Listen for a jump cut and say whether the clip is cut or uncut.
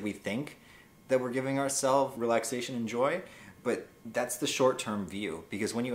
cut